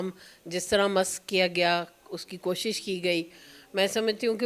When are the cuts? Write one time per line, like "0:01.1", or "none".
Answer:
none